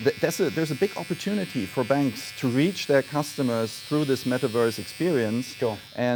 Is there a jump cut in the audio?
no; 0 cuts

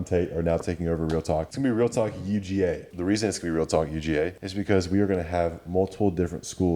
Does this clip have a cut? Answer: yes; 3 cuts; at 1.5 s, 2.9 s, 4.5 s

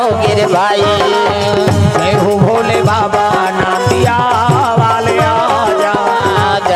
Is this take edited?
no; 0 cuts

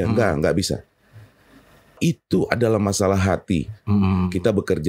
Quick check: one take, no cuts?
no; 1 cut; at 2.0 s

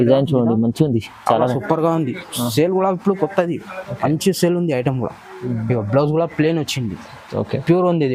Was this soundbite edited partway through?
no; 0 cuts

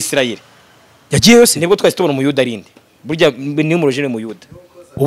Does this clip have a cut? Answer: no; 0 cuts

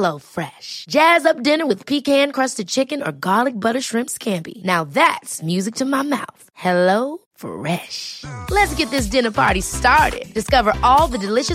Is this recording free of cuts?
yes; 0 cuts

